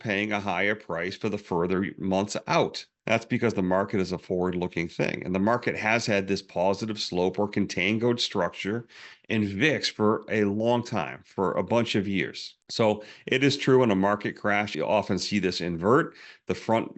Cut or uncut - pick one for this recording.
cut